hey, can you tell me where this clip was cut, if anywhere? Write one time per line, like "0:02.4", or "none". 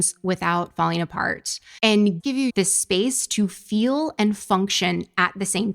0:02.2